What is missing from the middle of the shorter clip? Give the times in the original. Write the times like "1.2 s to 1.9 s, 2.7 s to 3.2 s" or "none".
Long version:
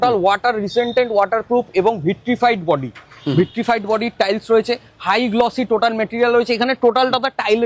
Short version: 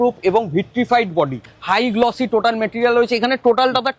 3.0 s to 4.9 s